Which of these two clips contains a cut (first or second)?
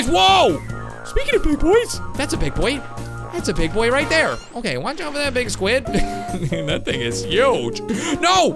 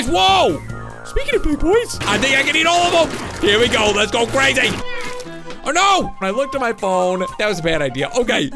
second